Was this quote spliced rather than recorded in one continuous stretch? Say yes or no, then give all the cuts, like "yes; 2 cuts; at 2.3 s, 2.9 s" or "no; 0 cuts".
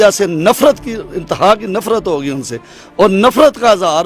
no; 0 cuts